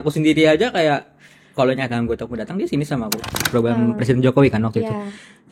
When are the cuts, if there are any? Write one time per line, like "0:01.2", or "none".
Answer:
0:03.4